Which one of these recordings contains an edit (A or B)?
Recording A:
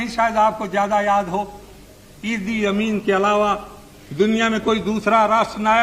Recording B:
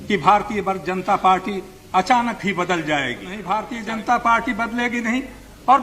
B